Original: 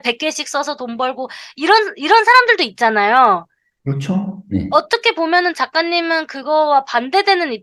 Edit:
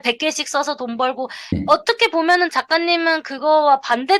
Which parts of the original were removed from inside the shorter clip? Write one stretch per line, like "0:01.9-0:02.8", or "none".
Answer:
0:01.4-0:04.5